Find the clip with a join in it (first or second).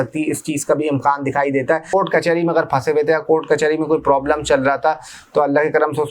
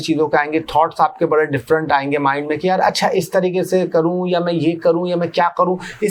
first